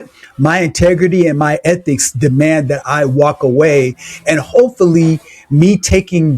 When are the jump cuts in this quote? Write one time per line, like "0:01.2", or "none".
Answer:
none